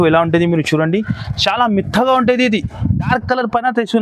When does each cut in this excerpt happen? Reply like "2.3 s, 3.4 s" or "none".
3.1 s